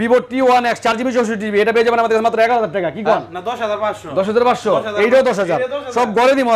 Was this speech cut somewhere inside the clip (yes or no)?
no